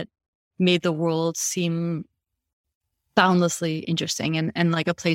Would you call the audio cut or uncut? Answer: uncut